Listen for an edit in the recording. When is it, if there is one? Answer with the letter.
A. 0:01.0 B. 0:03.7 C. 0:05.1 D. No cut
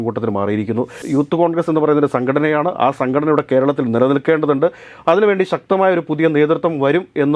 A